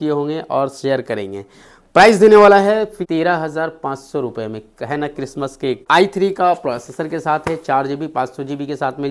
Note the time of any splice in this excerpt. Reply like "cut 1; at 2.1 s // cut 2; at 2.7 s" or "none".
cut 1; at 3.0 s // cut 2; at 5.8 s